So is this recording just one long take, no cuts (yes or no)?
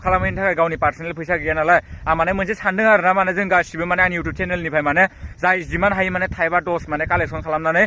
yes